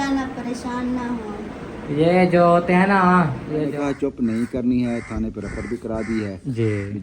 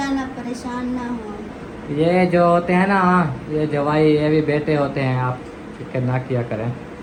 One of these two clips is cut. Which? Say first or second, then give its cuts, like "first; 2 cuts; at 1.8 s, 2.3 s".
first; 1 cut; at 3.7 s